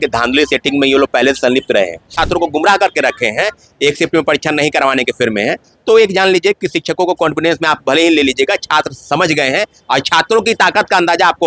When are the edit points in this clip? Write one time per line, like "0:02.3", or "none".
0:02.1